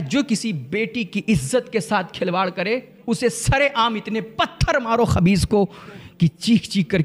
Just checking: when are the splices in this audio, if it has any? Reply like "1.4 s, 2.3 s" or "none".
none